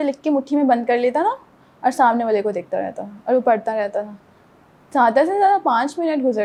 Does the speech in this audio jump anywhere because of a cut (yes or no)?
no